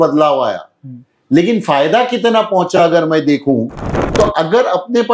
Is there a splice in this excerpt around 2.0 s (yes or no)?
no